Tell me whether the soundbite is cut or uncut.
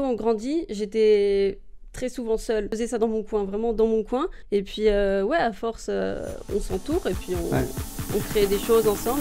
cut